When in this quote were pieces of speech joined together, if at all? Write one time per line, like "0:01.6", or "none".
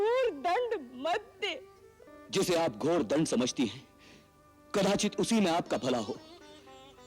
0:02.0